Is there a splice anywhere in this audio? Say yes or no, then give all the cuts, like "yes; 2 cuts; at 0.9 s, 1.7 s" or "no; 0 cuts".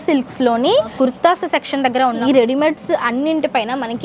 yes; 2 cuts; at 0.9 s, 2.2 s